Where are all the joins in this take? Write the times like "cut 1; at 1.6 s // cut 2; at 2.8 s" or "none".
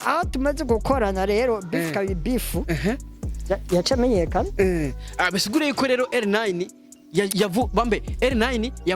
none

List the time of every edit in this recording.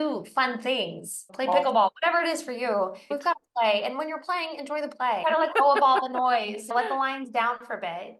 cut 1; at 1.3 s // cut 2; at 3.1 s // cut 3; at 5.2 s // cut 4; at 6.7 s

